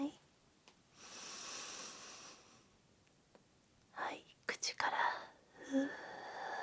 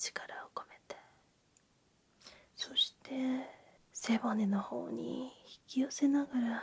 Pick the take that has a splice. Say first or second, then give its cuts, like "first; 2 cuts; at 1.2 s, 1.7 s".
second; 1 cut; at 2.2 s